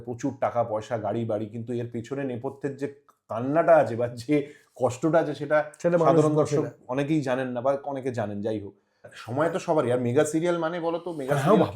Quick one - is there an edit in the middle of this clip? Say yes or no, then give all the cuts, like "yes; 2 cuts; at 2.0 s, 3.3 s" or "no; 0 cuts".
yes; 1 cut; at 9.2 s